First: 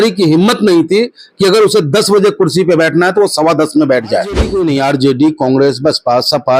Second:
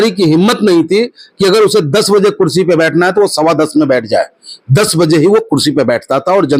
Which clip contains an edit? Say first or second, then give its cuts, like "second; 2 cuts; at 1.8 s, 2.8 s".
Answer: first; 1 cut; at 4.5 s